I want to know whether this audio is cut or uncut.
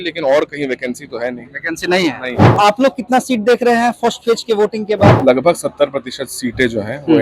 cut